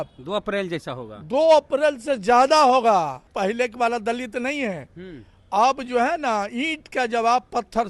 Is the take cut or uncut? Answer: cut